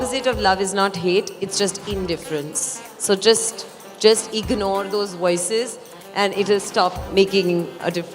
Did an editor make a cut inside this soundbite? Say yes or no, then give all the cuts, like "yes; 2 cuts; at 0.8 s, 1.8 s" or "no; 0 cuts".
yes; 1 cut; at 7.1 s